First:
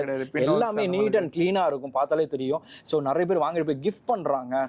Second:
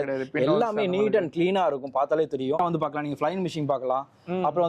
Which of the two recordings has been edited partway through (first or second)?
second